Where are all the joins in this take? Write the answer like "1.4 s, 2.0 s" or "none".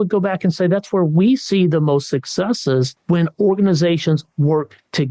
3.0 s